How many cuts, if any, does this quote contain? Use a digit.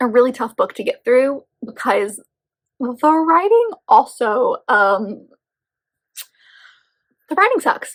0